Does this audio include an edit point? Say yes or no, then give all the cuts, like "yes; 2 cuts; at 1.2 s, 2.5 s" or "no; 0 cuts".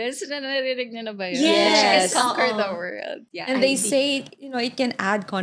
no; 0 cuts